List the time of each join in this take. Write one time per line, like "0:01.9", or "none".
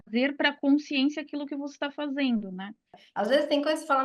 0:03.0